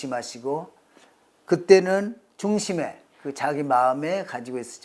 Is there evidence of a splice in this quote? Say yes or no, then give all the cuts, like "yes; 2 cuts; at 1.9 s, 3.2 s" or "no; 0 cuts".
no; 0 cuts